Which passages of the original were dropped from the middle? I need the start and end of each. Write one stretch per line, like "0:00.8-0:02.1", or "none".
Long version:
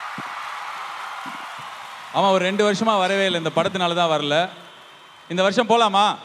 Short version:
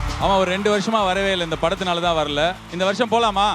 0:04.6-0:05.2